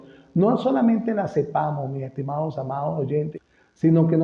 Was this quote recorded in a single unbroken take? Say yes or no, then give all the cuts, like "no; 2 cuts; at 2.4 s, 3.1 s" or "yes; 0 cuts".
no; 1 cut; at 3.3 s